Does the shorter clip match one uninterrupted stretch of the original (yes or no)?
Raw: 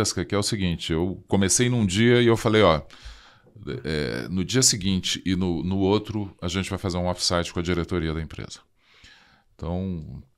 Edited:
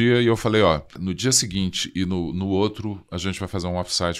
no